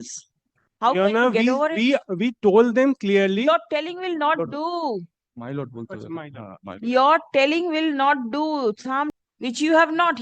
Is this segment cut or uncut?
cut